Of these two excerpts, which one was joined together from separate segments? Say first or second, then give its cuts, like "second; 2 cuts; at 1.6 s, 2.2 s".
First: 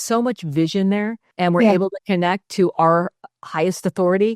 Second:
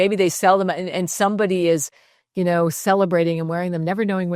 first; 1 cut; at 1.2 s